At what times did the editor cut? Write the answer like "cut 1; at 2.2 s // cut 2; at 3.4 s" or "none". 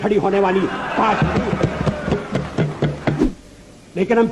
cut 1; at 3.2 s